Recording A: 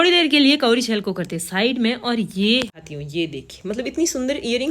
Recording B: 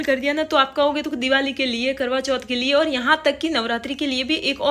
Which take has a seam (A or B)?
A